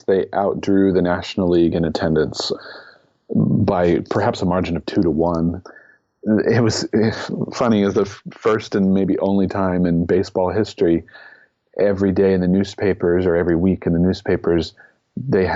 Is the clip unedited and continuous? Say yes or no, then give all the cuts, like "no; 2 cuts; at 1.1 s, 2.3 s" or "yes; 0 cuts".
no; 2 cuts; at 2.5 s, 5.7 s